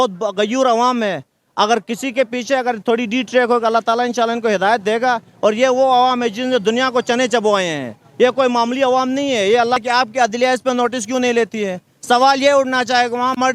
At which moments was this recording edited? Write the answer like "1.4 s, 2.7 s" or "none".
9.8 s